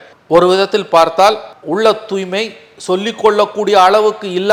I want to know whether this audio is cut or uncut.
uncut